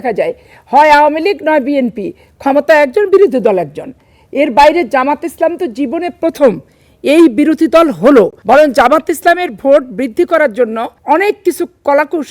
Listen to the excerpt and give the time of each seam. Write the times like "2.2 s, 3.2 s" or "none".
8.4 s, 10.9 s